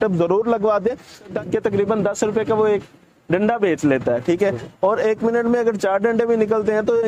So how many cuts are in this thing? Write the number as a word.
one